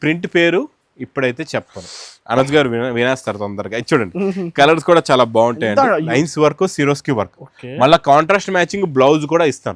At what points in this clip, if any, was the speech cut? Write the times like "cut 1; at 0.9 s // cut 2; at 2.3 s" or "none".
cut 1; at 6.1 s